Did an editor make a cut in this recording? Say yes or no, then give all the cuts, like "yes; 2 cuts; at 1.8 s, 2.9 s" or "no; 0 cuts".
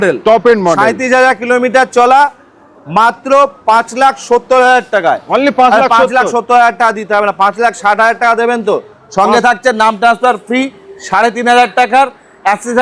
no; 0 cuts